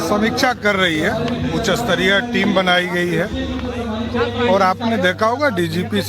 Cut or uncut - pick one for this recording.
cut